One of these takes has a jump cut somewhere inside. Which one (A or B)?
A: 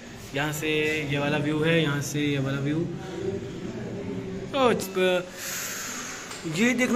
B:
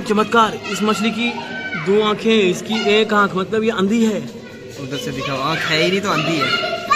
A